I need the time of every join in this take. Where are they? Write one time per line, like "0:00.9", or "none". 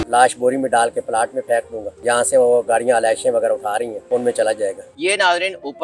0:01.8
0:04.0
0:04.9